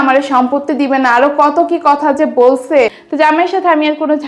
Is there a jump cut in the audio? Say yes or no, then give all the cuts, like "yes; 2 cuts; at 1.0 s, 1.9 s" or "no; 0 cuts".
no; 0 cuts